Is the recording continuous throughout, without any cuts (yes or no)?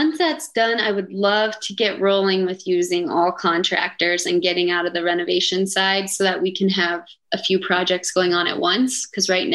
yes